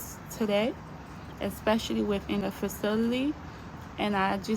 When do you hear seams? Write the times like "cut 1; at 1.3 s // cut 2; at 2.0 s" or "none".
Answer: cut 1; at 2.4 s